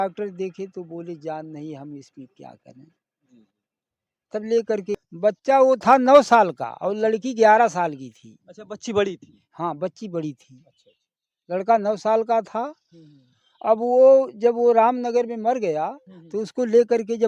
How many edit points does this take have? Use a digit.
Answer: 1